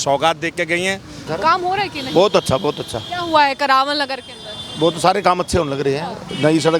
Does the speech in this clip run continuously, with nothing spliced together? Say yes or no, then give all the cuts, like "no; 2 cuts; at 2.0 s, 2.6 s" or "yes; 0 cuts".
no; 1 cut; at 1.3 s